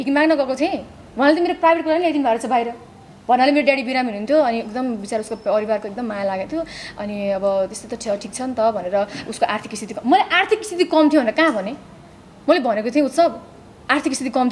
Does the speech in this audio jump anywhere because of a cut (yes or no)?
no